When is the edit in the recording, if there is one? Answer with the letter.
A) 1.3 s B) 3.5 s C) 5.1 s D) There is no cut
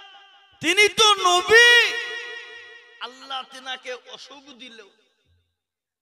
D